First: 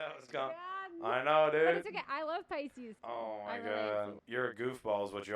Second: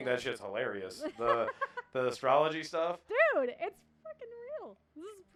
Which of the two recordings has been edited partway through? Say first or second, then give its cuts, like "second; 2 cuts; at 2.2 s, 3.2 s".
first; 2 cuts; at 2.9 s, 4.2 s